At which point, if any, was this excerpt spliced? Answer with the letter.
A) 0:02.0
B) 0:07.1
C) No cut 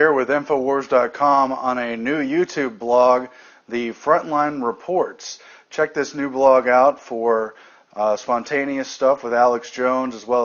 C